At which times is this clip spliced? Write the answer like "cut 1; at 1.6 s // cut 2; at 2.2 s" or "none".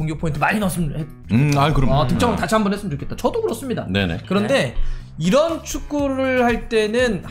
none